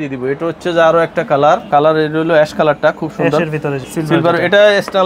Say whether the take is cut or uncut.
cut